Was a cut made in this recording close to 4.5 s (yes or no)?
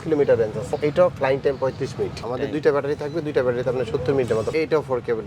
yes